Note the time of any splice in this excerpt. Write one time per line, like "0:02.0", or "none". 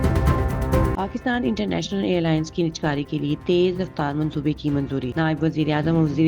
0:01.0